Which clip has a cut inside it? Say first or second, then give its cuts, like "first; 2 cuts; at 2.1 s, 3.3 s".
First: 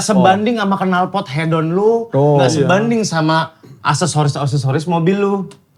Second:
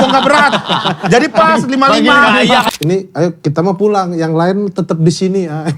second; 1 cut; at 2.7 s